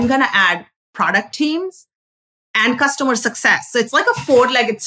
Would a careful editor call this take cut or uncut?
uncut